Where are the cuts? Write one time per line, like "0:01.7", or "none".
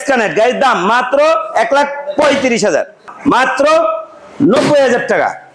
0:03.1